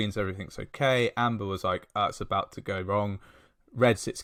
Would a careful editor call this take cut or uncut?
uncut